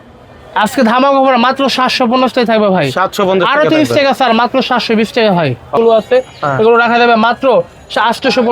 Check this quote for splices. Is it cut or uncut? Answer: cut